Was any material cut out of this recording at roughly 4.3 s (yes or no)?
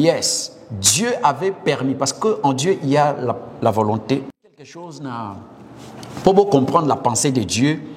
yes